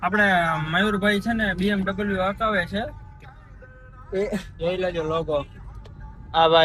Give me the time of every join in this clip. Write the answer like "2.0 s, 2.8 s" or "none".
none